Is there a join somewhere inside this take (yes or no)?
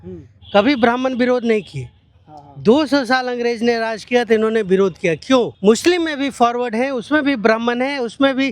yes